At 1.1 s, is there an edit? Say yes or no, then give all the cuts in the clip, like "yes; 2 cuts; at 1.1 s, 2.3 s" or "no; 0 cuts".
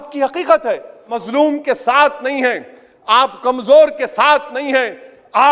yes; 1 cut; at 1.1 s